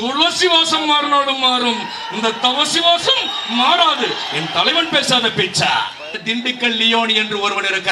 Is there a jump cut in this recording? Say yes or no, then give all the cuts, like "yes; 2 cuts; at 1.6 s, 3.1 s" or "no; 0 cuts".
yes; 1 cut; at 6.1 s